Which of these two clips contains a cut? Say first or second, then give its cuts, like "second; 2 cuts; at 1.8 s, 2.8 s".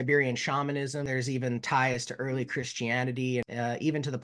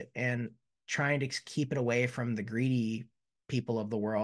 first; 2 cuts; at 1.1 s, 3.4 s